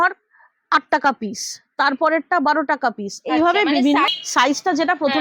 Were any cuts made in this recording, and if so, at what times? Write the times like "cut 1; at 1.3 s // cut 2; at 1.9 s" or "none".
cut 1; at 4.2 s

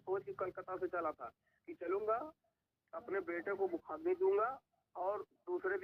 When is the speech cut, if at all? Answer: none

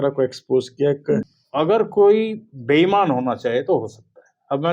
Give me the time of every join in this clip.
cut 1; at 1.2 s

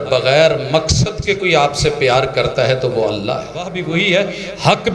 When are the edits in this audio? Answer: cut 1; at 3.8 s

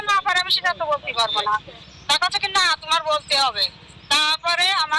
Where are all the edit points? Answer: none

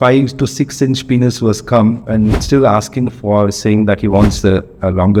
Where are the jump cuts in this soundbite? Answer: none

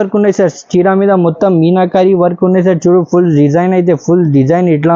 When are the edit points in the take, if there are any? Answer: none

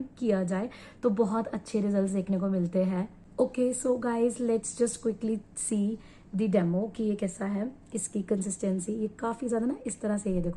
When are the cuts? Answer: none

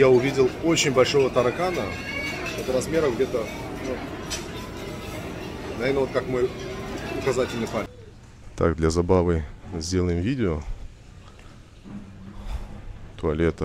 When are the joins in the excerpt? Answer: cut 1; at 8.0 s

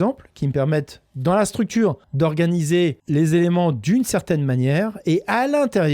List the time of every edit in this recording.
cut 1; at 2.0 s // cut 2; at 3.0 s

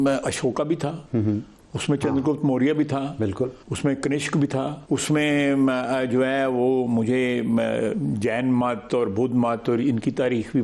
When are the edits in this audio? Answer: cut 1; at 1.0 s // cut 2; at 3.6 s // cut 3; at 4.8 s

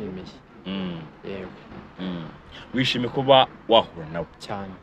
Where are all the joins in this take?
none

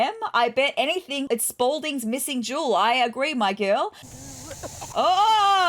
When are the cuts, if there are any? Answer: cut 1; at 4.0 s

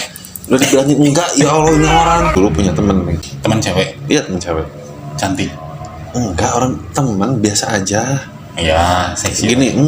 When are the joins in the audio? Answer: cut 1; at 2.4 s // cut 2; at 3.2 s

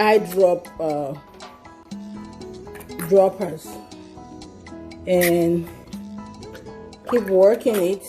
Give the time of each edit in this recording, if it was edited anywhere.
cut 1; at 1.2 s // cut 2; at 3.0 s

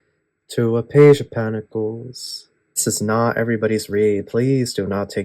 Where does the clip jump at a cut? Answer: cut 1; at 2.8 s

